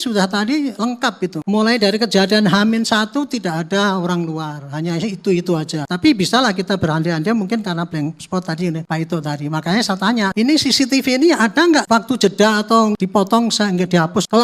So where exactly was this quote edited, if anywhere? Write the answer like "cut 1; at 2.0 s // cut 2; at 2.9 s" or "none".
none